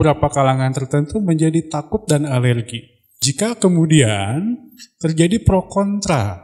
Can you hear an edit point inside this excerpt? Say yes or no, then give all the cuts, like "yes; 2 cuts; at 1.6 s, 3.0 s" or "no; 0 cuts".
yes; 1 cut; at 3.2 s